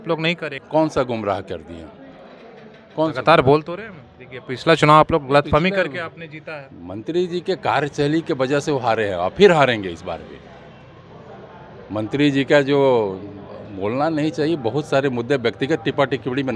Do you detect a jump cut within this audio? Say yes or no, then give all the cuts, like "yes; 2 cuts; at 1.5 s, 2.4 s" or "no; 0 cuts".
no; 0 cuts